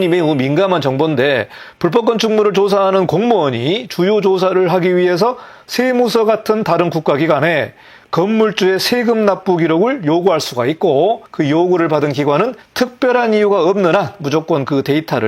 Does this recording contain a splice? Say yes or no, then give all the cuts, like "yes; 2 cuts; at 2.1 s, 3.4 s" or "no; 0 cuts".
no; 0 cuts